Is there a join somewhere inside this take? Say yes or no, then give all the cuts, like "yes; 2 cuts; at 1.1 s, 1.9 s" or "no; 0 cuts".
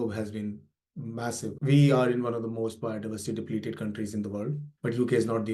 no; 0 cuts